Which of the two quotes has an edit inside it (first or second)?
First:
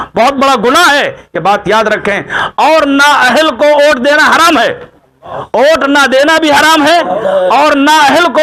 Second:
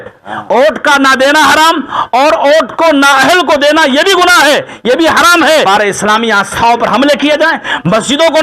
second